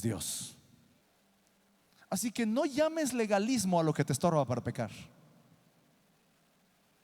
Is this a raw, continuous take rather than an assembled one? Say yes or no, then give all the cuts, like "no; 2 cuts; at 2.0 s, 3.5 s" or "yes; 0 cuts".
no; 1 cut; at 1.0 s